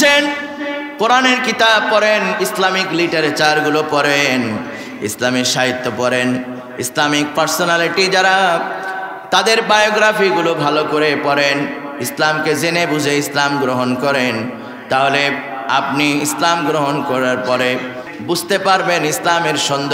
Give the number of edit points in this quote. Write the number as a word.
one